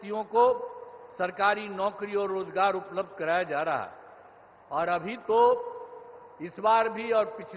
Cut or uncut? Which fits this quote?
uncut